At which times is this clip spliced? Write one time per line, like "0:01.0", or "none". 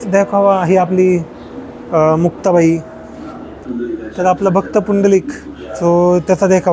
0:03.7

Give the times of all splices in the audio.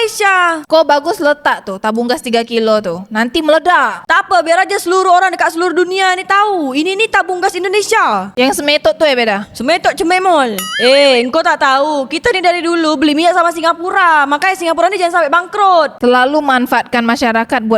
0:10.6
0:15.9

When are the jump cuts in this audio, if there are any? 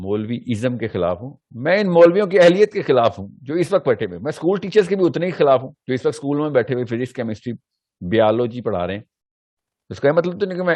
none

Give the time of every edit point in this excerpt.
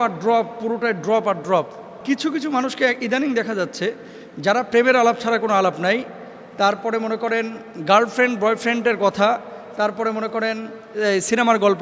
0:02.0

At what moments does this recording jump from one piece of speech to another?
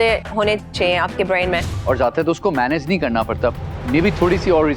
0:01.7

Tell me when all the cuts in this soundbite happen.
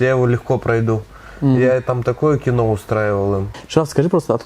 0:03.5

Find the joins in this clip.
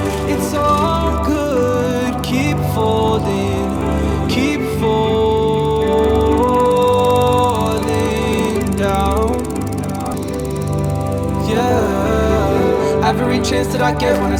none

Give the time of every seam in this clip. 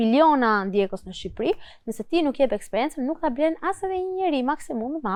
none

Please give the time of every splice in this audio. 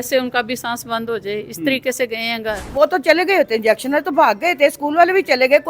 0:02.6

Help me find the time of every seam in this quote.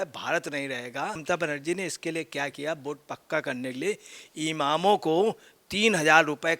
0:01.2

